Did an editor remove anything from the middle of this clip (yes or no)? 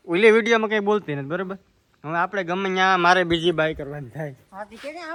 no